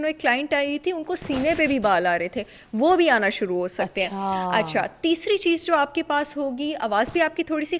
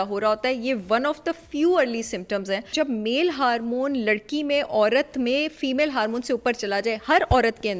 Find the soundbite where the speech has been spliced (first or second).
second